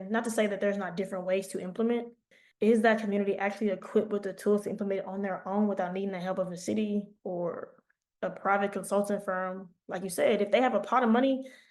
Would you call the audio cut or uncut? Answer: cut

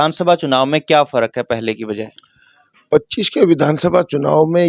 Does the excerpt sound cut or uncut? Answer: uncut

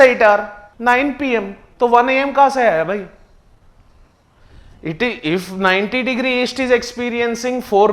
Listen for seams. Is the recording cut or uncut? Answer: uncut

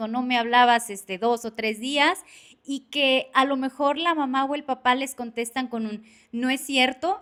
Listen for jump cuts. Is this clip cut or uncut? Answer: uncut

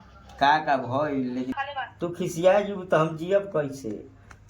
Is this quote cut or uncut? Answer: cut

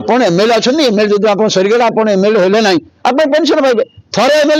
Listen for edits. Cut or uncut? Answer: uncut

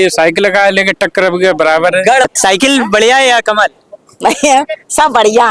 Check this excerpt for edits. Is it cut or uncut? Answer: cut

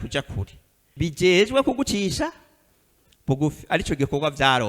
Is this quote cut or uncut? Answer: cut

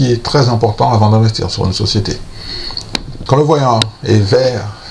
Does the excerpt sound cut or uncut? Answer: cut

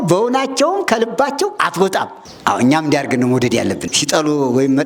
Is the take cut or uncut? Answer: cut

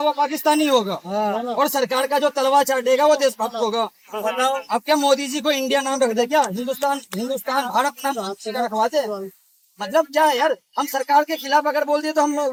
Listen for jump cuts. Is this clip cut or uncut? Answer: uncut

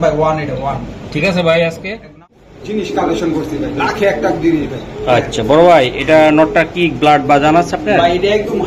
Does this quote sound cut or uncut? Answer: cut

